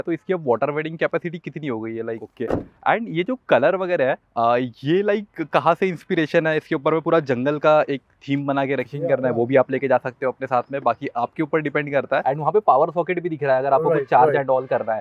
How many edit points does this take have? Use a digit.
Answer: 3